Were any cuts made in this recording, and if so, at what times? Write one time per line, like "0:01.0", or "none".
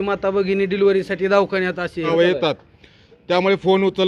0:02.1